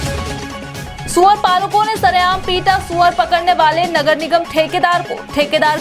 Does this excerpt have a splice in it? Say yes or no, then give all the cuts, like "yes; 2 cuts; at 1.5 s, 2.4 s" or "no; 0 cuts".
yes; 1 cut; at 0.9 s